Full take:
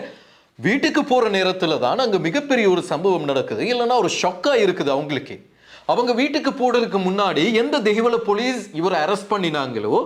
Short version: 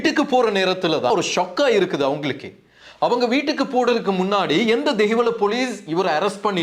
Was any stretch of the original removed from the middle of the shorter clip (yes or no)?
yes